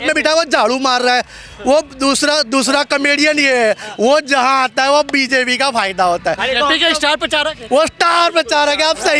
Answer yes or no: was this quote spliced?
no